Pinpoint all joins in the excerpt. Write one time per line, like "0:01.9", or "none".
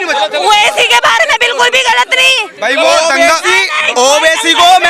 none

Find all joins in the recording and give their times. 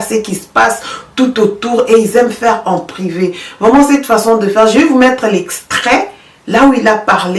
none

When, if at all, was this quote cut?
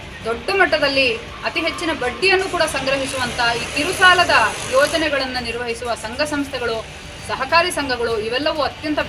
none

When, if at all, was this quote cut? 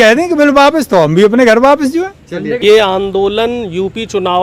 0:02.5

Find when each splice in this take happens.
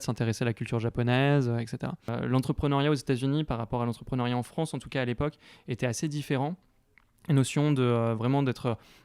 0:01.9

